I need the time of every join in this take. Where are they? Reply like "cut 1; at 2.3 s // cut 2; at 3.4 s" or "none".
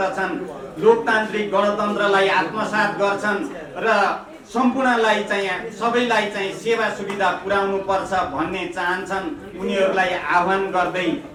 none